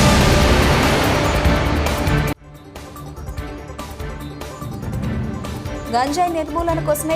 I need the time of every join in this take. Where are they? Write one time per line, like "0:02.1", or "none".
0:05.3